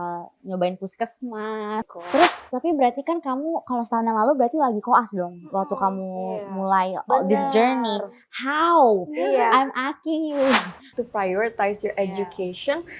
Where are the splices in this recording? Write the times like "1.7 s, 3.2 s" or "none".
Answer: 1.8 s, 11.0 s

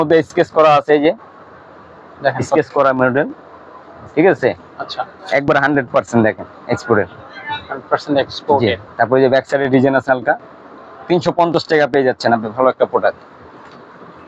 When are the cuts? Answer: none

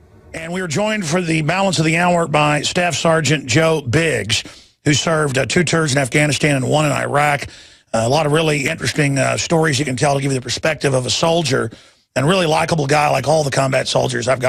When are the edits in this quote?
none

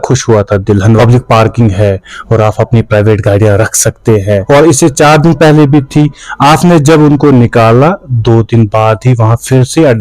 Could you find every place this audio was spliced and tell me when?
1.0 s, 4.4 s

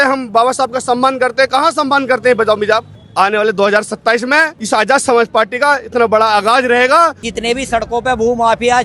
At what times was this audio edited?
3.0 s, 4.6 s, 7.2 s

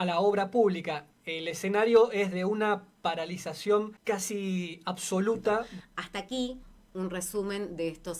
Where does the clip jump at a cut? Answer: 3.9 s, 5.7 s

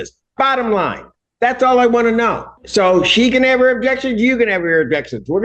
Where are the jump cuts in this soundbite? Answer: 2.5 s

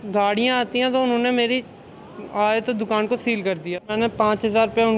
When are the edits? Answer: 3.8 s

